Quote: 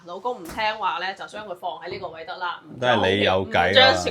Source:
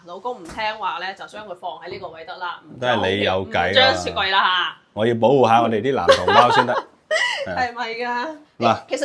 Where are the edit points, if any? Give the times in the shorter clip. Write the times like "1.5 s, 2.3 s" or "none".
none